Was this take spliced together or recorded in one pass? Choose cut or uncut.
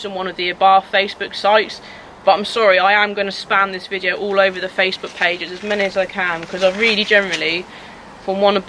uncut